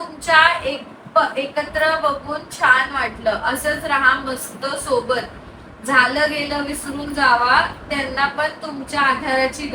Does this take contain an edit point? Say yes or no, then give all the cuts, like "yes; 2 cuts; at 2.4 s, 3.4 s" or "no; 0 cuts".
no; 0 cuts